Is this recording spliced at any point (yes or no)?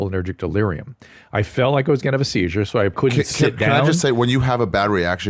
yes